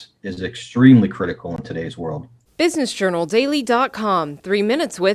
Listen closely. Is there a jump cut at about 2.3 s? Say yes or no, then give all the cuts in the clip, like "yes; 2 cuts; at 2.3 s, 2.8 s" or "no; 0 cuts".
yes; 1 cut; at 2.3 s